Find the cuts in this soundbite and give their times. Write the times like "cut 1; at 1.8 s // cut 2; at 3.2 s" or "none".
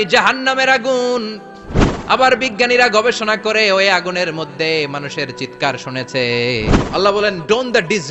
cut 1; at 6.8 s